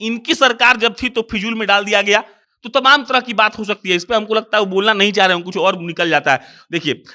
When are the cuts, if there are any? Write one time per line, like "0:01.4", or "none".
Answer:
none